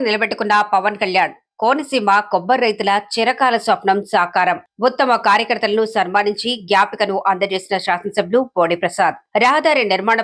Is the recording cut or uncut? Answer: uncut